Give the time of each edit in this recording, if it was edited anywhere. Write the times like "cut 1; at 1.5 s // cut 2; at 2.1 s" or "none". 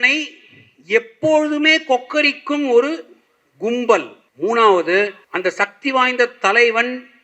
cut 1; at 4.2 s // cut 2; at 5.2 s

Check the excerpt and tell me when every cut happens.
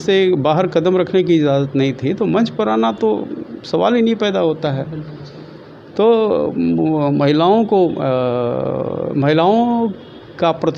none

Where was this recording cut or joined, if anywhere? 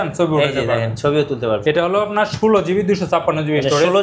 cut 1; at 1.6 s

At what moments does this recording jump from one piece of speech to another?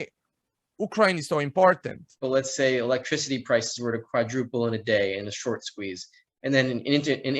cut 1; at 2.2 s

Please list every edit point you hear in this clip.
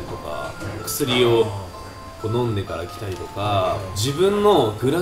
none

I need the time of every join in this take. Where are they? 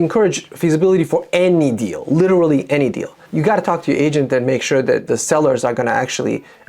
cut 1; at 3.3 s // cut 2; at 5.0 s

